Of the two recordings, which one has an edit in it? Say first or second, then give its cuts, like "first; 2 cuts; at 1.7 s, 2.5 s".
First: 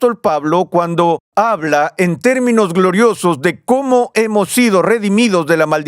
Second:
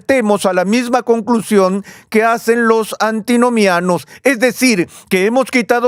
first; 1 cut; at 1.2 s